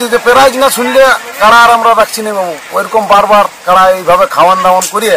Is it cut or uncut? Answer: uncut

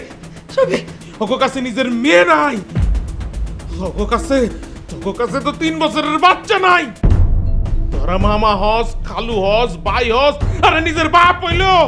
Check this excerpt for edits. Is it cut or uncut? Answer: uncut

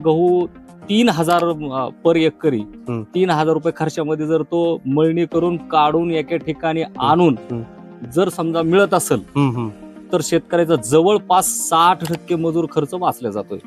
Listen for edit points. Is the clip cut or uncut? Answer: uncut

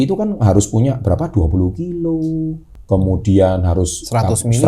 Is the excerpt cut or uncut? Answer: cut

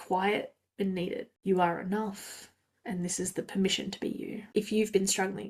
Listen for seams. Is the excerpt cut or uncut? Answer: cut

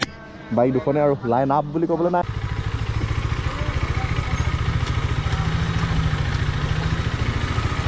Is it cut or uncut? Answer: cut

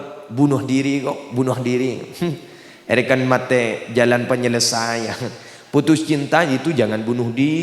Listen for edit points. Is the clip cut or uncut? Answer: uncut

